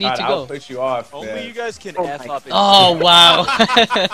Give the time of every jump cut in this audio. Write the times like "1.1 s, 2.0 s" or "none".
none